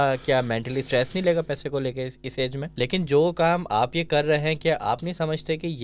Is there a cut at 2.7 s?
yes; 1 cut; at 2.7 s

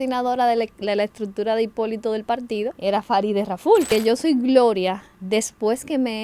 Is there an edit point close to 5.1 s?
yes; 3 cuts; at 2.8 s, 3.9 s, 5.1 s

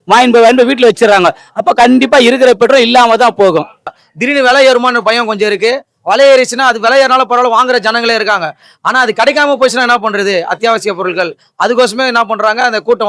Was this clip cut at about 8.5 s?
no; 1 cut; at 3.9 s

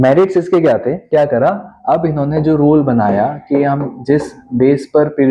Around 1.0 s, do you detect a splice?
yes; 1 cut; at 1.0 s

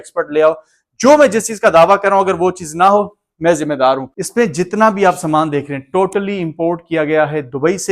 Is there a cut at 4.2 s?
yes; 1 cut; at 4.2 s

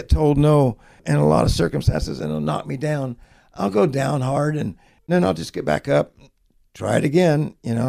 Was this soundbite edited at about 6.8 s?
no; 2 cuts; at 1.0 s, 5.1 s

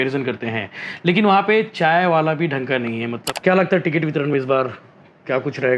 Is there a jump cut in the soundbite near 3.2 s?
yes; 1 cut; at 3.2 s

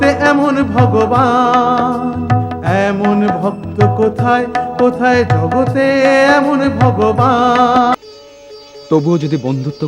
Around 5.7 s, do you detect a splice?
no; 1 cut; at 7.9 s

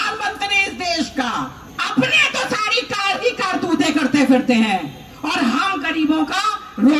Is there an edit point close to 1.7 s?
yes; 1 cut; at 1.7 s

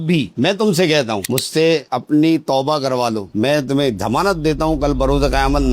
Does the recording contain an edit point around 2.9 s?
no; 1 cut; at 1.2 s

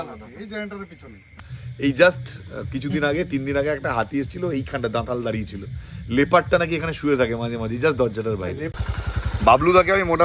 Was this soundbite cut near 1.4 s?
yes; 2 cuts; at 1.4 s, 8.8 s

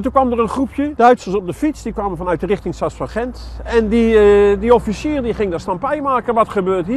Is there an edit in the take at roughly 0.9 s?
yes; 1 cut; at 0.9 s

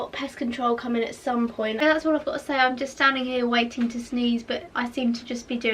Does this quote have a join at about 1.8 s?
yes; 1 cut; at 1.8 s

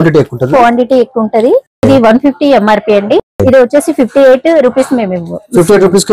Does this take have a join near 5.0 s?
no; 2 cuts; at 1.8 s, 3.3 s

